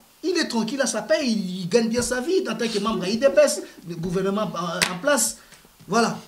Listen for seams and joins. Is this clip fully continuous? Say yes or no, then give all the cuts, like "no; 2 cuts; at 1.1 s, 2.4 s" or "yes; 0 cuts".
yes; 0 cuts